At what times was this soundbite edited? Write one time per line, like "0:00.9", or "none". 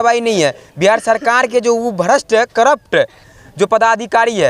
none